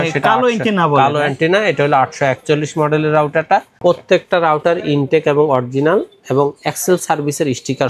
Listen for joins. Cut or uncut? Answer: cut